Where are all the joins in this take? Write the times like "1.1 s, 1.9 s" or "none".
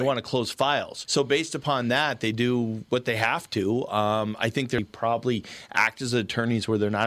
4.8 s